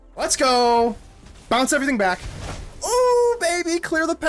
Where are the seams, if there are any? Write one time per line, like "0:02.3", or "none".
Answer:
none